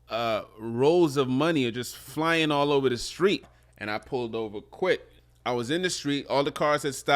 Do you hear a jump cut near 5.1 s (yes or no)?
yes